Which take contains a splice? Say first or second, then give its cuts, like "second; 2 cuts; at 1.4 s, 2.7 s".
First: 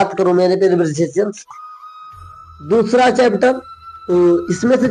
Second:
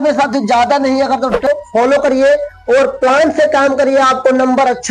second; 1 cut; at 1.5 s